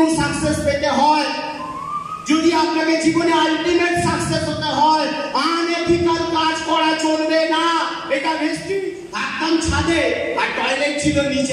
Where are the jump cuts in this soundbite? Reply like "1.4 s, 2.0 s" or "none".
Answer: 9.0 s